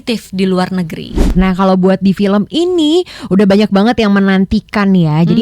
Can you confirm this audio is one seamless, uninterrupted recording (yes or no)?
no